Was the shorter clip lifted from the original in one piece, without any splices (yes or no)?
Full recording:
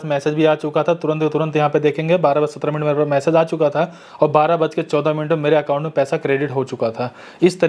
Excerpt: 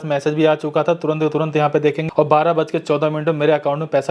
no